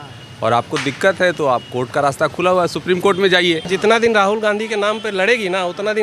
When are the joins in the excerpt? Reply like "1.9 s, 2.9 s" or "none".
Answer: 3.6 s